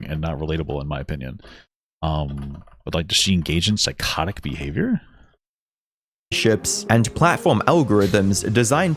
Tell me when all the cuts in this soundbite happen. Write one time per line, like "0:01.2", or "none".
none